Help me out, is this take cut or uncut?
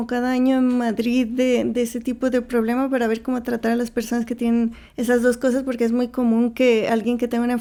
uncut